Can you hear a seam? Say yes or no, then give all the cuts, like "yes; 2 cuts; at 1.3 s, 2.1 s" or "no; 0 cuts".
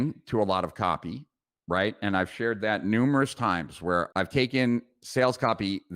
yes; 1 cut; at 4.1 s